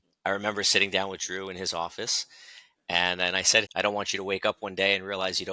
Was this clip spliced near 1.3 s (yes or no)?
no